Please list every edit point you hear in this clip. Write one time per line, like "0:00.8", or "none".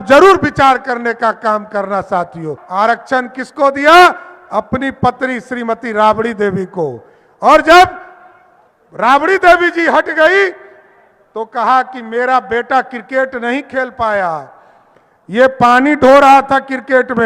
0:02.6